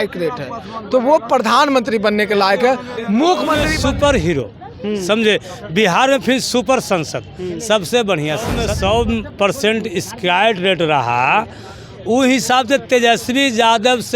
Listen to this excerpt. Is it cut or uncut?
cut